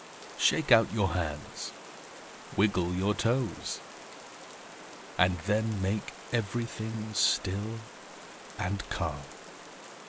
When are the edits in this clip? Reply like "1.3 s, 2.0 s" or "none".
3.6 s, 5.2 s